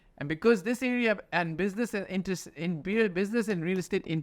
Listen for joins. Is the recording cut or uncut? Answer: uncut